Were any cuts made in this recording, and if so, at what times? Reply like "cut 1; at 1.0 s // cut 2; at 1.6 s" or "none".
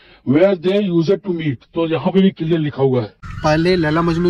cut 1; at 3.2 s